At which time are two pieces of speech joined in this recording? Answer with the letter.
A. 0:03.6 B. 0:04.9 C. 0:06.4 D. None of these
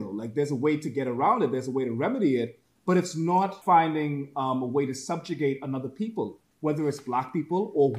A